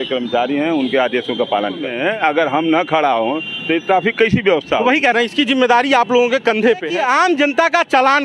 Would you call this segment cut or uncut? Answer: cut